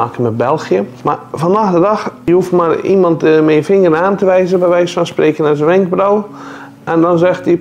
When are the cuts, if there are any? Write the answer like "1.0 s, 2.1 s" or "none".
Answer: 0.9 s, 2.1 s